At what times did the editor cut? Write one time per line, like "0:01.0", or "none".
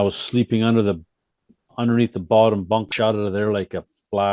0:02.9